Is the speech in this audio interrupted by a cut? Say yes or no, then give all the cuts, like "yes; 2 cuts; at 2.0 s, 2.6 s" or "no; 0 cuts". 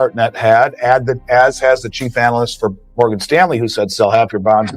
yes; 1 cut; at 2.8 s